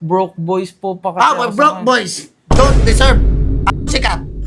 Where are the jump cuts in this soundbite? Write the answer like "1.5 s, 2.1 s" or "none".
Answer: none